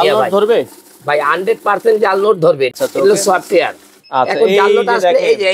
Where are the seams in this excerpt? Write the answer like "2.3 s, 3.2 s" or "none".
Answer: 2.7 s